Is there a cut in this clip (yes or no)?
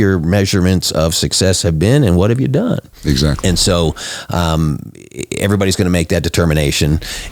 yes